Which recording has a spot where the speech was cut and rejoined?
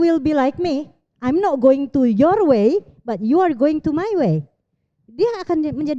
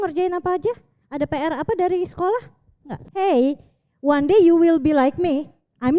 second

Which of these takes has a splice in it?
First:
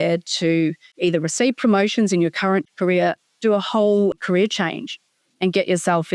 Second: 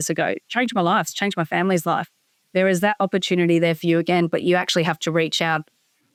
first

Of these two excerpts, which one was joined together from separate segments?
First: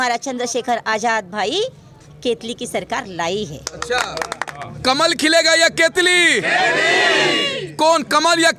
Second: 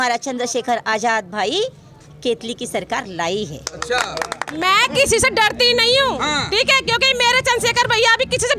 second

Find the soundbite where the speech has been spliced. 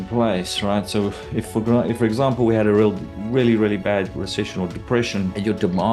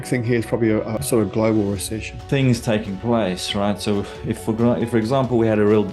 second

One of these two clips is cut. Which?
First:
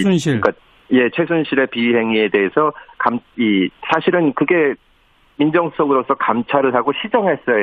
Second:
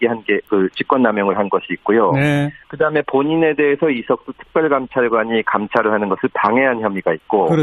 second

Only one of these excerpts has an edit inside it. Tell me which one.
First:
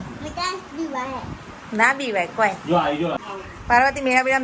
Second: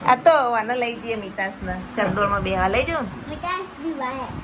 first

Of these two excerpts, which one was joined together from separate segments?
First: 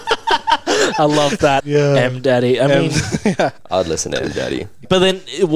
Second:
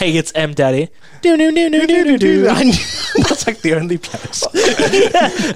first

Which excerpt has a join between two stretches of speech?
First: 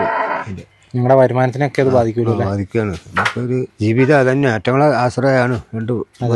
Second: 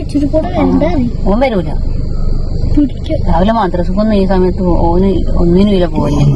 first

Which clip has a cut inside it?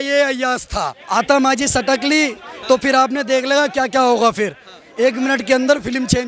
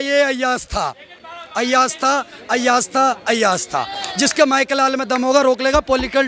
first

